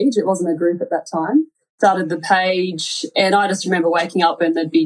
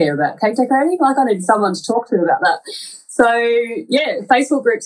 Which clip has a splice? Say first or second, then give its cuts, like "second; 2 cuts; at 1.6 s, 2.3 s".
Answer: first; 1 cut; at 1.6 s